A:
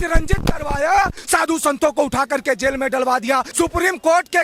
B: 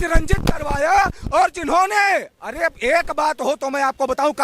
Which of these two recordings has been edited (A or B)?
A